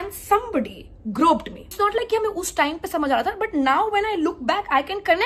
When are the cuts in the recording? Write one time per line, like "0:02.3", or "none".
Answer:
0:01.6